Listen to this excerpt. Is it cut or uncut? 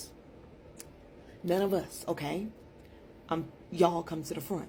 uncut